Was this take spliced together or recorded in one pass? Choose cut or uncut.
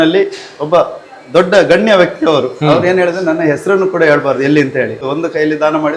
cut